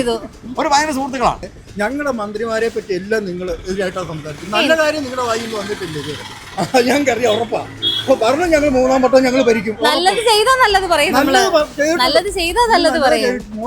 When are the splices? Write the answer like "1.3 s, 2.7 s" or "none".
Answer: 1.5 s